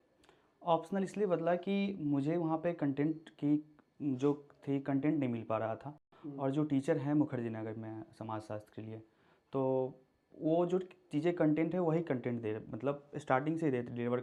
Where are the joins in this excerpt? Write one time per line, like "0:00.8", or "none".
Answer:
none